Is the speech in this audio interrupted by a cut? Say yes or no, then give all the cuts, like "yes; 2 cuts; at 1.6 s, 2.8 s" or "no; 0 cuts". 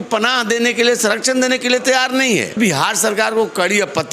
yes; 1 cut; at 2.5 s